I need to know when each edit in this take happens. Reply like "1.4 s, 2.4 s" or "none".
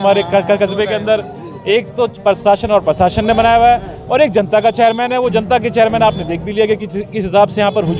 none